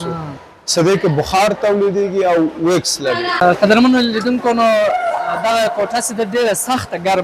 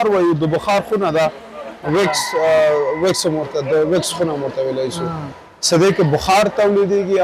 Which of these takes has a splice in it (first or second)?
first